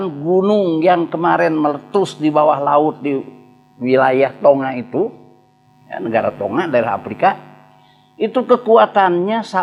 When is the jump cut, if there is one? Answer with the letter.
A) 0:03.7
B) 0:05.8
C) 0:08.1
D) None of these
D